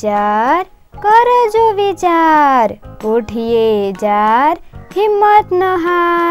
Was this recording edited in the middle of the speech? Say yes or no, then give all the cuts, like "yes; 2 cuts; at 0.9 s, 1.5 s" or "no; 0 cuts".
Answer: no; 0 cuts